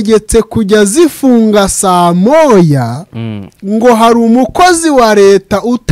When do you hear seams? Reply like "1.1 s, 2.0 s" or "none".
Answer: none